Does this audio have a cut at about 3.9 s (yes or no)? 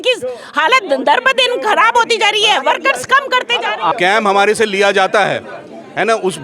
yes